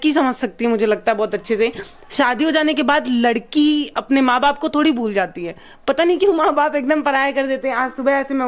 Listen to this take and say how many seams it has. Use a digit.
0